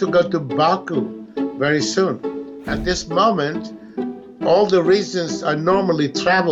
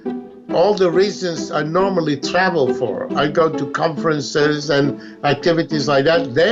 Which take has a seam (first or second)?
first